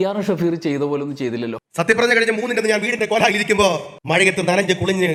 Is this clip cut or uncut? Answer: uncut